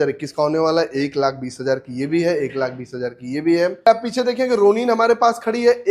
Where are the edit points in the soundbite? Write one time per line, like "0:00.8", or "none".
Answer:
0:03.9